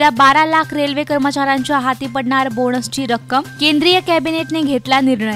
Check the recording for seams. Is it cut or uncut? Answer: uncut